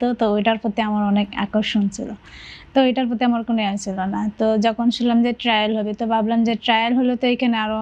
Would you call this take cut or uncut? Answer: uncut